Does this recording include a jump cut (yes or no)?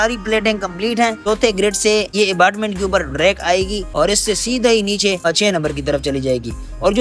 yes